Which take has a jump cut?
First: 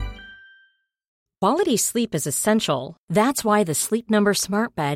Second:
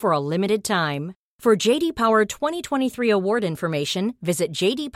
first; 1 cut; at 1.2 s

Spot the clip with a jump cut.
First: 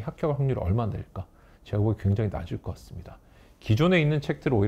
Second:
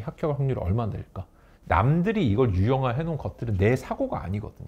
second; 1 cut; at 1.5 s

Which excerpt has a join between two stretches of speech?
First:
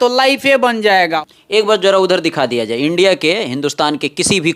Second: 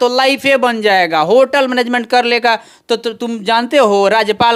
first; 1 cut; at 1.2 s

